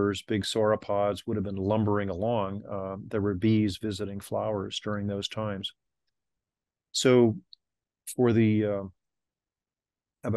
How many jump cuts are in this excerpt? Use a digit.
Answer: 0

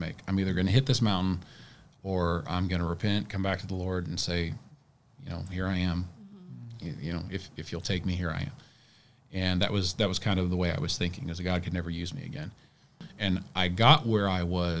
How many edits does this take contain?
1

